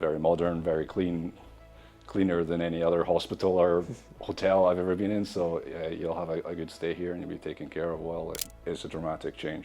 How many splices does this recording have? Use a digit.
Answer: 1